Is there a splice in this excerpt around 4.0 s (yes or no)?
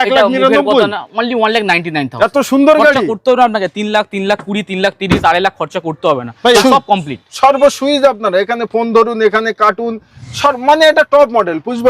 no